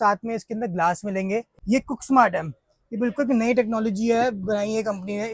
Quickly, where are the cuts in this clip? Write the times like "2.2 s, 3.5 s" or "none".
1.5 s